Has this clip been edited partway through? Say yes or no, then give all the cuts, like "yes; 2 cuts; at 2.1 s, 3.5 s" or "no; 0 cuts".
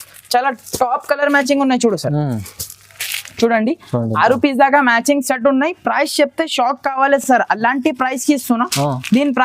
no; 0 cuts